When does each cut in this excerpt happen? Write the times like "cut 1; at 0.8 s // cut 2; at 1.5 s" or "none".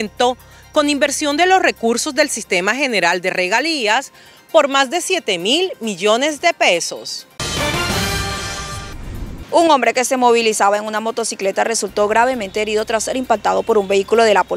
cut 1; at 7.4 s // cut 2; at 9.3 s